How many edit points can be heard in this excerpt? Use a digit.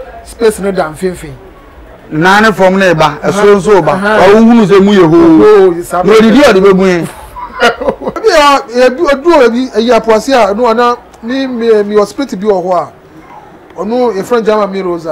1